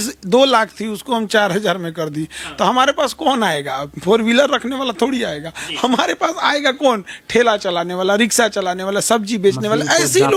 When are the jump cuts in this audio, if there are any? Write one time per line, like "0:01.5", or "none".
none